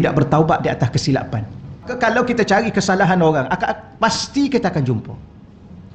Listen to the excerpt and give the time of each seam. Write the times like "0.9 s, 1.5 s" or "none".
1.9 s